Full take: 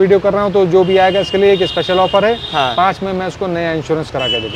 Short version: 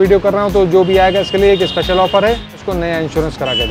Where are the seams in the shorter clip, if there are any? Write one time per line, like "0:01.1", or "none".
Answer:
0:02.5